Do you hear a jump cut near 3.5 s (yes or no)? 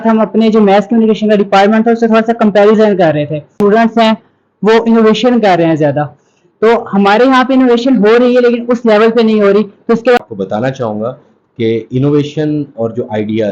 yes